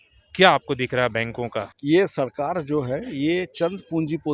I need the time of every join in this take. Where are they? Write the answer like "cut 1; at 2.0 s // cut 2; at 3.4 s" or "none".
cut 1; at 1.7 s